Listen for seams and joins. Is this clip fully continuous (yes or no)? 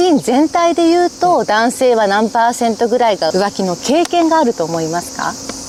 yes